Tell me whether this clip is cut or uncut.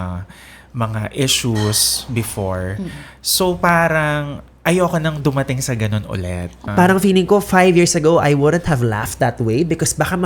cut